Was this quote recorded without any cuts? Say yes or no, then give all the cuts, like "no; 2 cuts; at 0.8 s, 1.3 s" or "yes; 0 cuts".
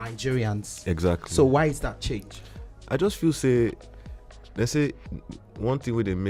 yes; 0 cuts